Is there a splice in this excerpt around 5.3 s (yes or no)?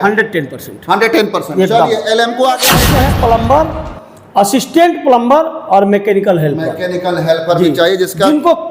no